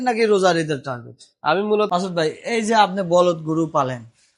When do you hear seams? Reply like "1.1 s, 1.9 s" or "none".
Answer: 1.9 s